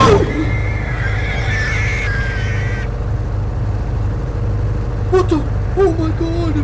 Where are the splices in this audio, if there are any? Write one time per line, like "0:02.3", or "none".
none